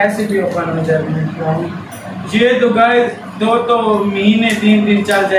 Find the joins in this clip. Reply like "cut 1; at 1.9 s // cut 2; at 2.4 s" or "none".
none

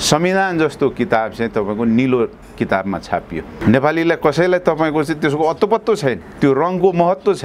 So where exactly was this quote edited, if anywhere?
none

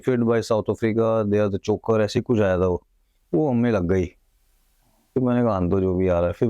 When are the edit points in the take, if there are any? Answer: none

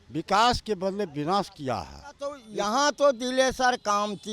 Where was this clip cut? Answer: cut 1; at 2.4 s

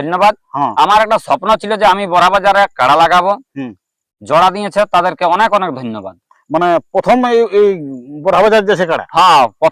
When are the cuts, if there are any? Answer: none

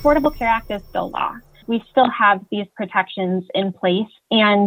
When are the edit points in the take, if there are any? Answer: cut 1; at 1.6 s

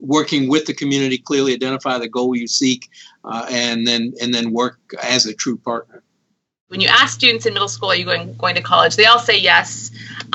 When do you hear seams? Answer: cut 1; at 6.7 s

